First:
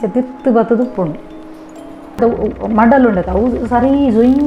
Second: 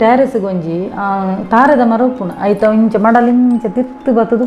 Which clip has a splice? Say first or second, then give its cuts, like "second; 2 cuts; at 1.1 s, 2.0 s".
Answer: first; 1 cut; at 2.2 s